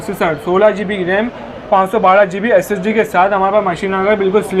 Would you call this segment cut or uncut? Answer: uncut